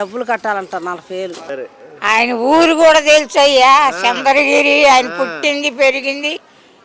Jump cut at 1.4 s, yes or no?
yes